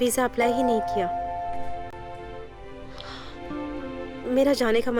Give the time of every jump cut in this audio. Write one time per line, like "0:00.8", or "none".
none